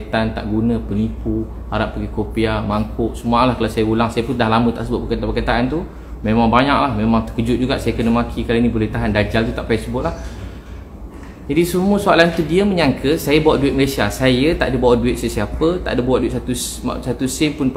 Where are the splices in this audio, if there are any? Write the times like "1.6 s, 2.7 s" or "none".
none